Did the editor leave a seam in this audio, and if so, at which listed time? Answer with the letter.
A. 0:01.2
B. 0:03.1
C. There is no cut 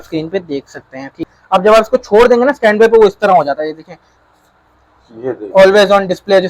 A